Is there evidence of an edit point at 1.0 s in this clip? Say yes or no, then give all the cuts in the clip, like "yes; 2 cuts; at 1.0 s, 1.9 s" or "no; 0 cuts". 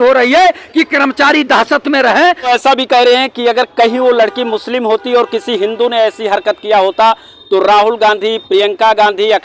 no; 1 cut; at 2.5 s